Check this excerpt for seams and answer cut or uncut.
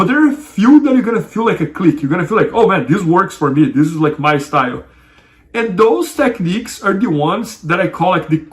uncut